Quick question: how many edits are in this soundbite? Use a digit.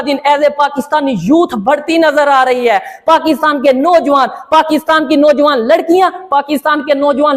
0